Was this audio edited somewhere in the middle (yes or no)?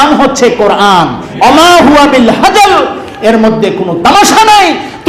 yes